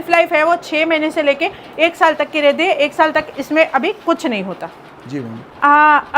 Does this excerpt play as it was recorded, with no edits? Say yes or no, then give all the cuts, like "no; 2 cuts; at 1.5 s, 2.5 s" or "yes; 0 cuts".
yes; 0 cuts